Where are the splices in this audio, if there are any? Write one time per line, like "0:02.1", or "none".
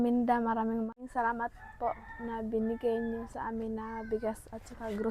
0:00.9